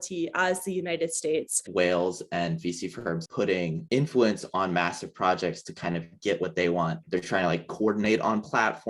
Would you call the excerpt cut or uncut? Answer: cut